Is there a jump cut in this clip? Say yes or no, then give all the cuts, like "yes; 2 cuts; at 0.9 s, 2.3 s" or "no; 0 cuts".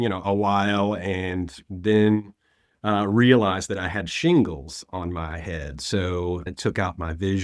yes; 1 cut; at 6.5 s